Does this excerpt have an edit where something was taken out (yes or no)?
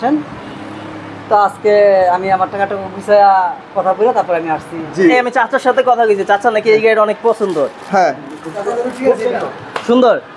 yes